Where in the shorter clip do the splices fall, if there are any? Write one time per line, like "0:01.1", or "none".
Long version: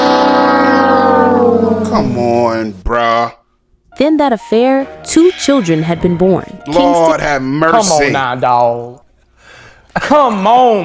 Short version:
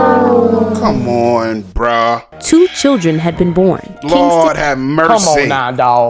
0:02.3